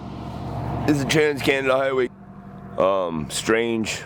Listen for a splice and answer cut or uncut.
cut